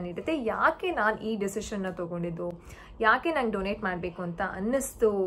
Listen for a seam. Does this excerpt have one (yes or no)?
no